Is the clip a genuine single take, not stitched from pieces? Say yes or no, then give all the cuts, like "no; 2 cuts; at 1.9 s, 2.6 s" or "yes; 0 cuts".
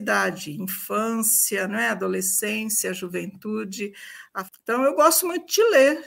no; 1 cut; at 4.4 s